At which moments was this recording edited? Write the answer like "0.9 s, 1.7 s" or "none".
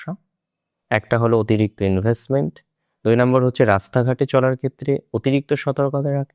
none